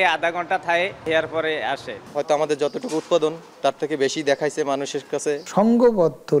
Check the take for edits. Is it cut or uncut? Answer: cut